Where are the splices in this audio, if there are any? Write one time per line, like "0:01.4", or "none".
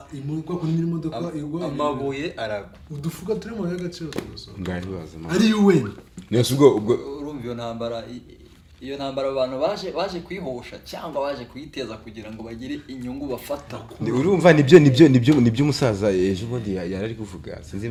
none